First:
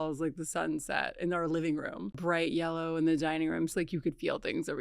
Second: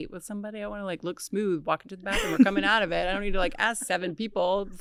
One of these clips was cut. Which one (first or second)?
first